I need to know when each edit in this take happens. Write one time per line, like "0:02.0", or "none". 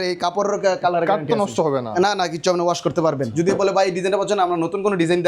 0:03.3